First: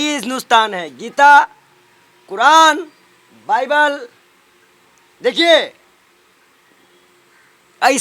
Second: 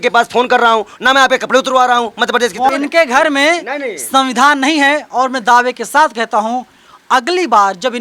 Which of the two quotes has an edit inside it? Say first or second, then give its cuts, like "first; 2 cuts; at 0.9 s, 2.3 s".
second; 1 cut; at 2.7 s